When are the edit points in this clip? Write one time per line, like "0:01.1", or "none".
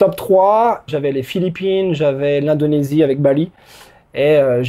0:00.9